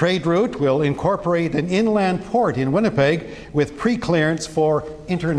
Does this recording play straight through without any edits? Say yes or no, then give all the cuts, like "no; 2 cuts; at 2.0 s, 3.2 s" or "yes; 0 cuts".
yes; 0 cuts